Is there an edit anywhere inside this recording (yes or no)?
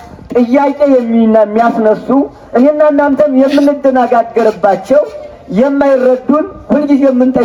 no